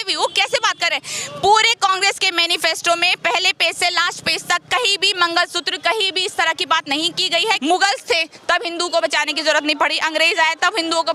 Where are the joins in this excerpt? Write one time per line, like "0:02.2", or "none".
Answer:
0:07.6